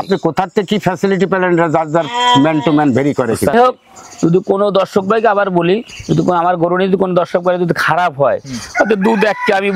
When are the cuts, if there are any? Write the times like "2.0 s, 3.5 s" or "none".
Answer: 3.5 s